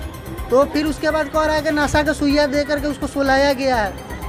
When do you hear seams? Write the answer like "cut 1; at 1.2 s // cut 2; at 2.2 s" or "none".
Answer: none